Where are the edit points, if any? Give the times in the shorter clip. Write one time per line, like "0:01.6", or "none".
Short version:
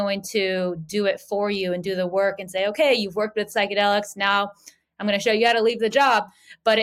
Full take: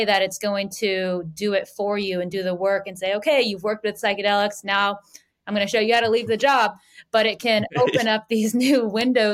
none